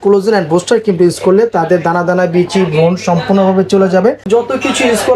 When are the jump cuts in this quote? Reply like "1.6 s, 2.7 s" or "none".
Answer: 4.2 s

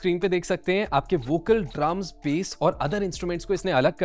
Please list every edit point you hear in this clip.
none

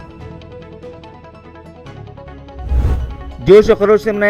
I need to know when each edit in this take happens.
none

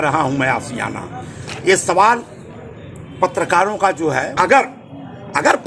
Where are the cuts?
4.3 s

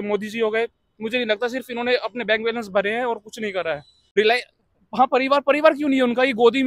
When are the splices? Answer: 3.9 s

